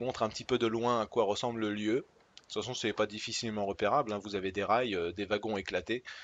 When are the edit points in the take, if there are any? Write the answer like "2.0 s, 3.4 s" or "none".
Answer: 3.7 s